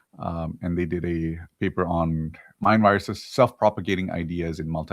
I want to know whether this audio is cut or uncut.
cut